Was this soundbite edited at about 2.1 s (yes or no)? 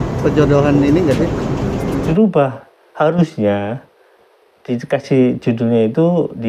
yes